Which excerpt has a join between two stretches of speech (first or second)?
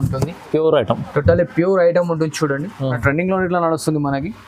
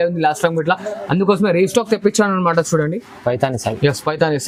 first